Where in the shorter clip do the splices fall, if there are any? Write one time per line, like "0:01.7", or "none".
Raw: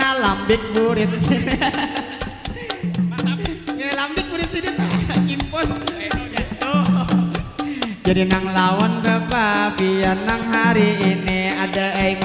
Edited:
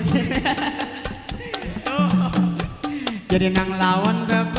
0:01.6